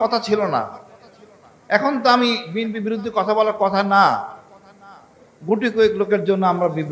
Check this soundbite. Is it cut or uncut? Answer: uncut